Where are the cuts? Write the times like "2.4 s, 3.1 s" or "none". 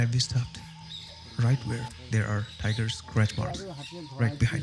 none